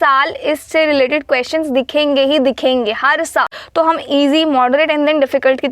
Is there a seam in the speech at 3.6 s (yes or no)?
yes